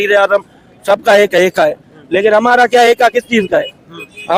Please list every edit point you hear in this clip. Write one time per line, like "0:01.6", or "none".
none